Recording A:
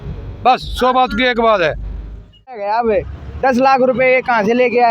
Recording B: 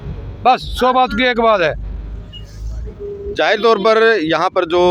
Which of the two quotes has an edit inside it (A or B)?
A